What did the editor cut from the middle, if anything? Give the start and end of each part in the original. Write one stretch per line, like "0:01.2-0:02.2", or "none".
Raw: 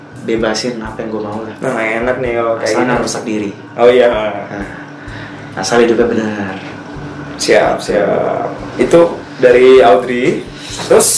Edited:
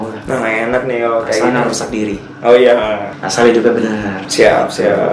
0:04.5-0:05.5
0:06.5-0:07.3